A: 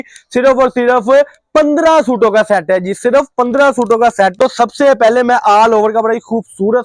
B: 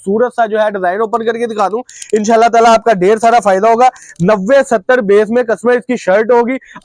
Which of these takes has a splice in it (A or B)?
A